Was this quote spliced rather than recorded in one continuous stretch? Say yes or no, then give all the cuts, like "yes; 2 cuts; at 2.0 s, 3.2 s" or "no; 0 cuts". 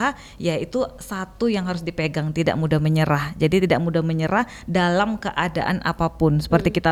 no; 0 cuts